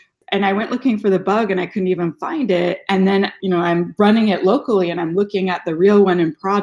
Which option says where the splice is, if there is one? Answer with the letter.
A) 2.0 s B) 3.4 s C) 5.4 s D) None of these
B